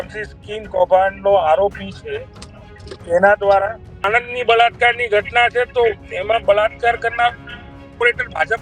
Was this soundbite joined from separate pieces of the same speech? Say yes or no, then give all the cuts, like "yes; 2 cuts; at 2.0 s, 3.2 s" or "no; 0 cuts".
yes; 1 cut; at 4.0 s